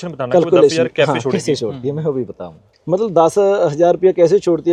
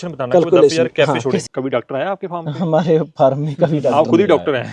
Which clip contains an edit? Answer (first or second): second